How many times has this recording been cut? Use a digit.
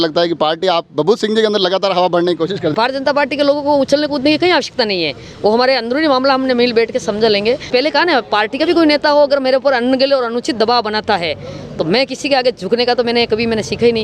2